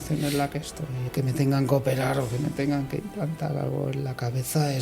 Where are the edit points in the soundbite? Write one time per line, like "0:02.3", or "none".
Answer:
0:01.0